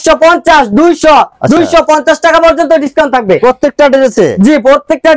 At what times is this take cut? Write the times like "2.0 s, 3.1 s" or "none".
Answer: none